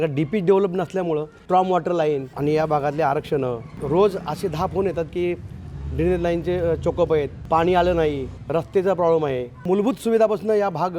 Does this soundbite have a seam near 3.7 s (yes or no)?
yes